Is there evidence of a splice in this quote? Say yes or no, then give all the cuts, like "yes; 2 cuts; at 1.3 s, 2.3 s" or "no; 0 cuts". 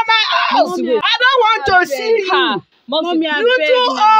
yes; 1 cut; at 1.1 s